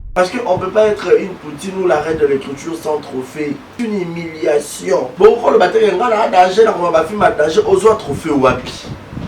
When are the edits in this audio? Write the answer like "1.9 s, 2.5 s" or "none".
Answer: 3.7 s, 5.1 s